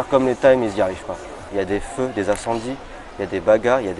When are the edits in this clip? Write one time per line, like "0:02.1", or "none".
0:01.4